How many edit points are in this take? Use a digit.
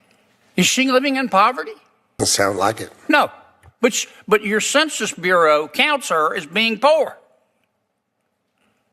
1